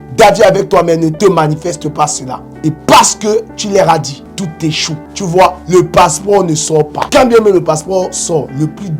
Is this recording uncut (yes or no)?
no